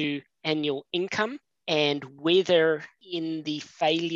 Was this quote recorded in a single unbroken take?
no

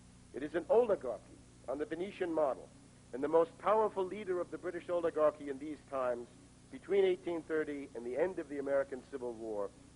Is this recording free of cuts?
yes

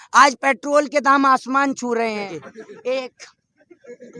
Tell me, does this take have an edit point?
yes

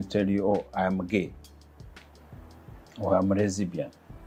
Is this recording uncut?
yes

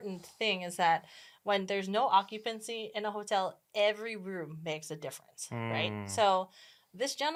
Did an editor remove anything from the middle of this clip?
no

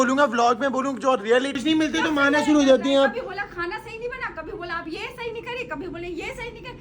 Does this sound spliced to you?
yes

